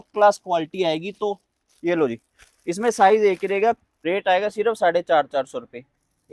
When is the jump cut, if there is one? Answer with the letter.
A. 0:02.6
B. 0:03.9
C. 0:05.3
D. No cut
B